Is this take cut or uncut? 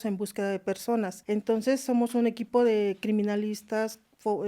cut